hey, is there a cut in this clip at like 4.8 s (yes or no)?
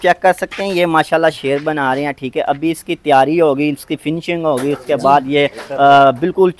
no